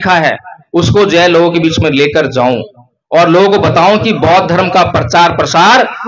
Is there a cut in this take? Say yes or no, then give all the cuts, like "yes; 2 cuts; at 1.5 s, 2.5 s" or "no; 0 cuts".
no; 0 cuts